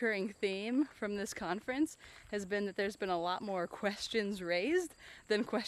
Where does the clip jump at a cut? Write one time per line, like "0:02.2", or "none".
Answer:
none